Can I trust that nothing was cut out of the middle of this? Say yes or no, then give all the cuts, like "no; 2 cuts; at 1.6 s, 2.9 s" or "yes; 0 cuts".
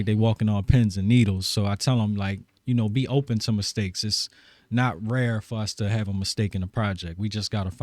yes; 0 cuts